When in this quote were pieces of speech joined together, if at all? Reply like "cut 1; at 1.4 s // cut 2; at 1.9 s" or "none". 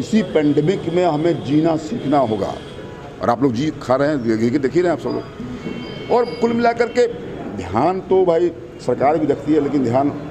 none